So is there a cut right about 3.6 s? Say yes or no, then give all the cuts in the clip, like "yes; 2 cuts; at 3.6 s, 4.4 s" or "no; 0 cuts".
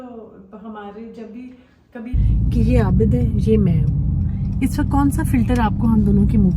no; 1 cut; at 2.2 s